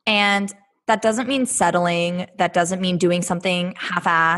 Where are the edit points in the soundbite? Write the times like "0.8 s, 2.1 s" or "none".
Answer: none